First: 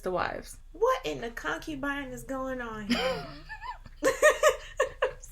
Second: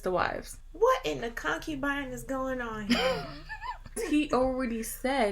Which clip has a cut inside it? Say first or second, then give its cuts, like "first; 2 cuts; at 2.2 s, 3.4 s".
second; 1 cut; at 3.9 s